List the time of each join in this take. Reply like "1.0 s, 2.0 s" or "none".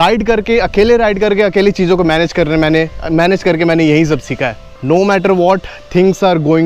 4.7 s